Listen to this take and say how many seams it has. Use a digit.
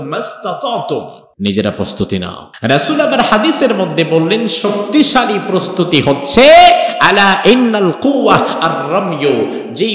2